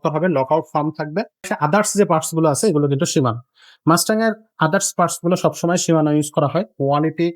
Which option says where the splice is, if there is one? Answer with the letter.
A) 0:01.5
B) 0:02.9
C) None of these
A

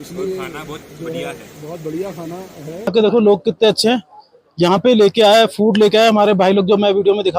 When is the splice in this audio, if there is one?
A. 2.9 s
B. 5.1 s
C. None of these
A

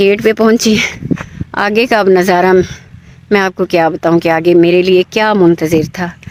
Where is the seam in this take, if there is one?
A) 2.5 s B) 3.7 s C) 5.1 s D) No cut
D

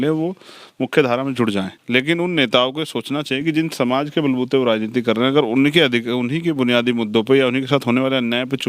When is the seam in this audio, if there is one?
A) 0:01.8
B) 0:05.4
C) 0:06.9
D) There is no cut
A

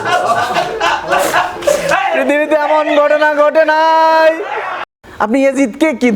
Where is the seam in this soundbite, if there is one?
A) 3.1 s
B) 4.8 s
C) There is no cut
B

